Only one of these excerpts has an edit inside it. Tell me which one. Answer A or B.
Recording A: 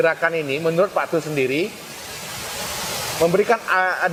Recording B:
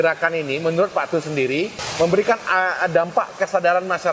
B